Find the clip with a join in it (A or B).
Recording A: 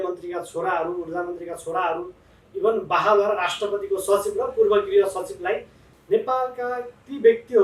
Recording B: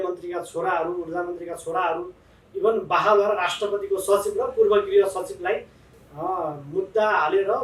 A